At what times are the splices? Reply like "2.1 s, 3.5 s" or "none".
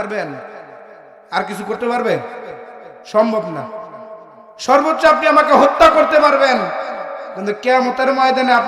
none